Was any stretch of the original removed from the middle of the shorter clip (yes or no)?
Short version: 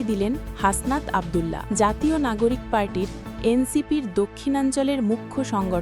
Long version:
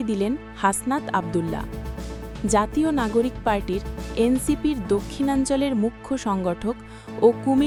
yes